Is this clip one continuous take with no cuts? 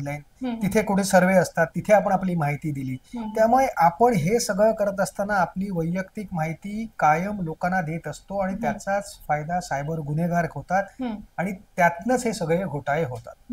yes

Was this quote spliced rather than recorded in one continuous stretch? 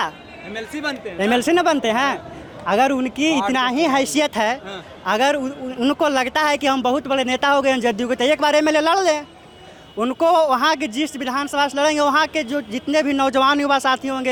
no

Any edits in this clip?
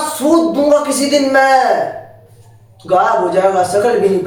no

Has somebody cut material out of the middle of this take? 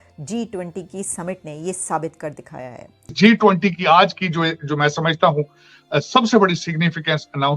yes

